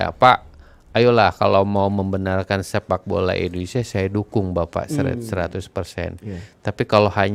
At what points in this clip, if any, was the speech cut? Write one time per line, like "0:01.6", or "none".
none